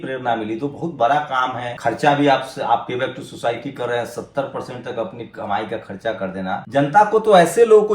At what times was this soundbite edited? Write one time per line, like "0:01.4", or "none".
0:01.7
0:06.6